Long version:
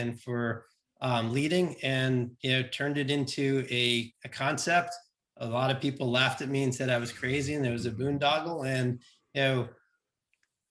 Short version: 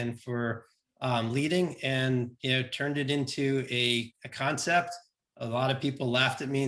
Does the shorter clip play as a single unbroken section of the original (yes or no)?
yes